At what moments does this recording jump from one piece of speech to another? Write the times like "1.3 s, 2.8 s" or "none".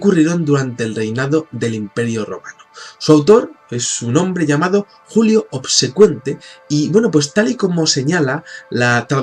7.8 s